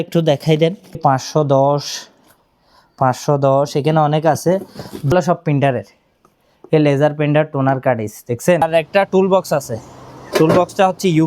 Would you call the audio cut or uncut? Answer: cut